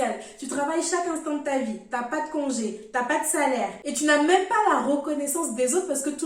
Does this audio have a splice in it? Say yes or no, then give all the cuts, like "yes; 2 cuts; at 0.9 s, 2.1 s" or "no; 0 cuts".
no; 0 cuts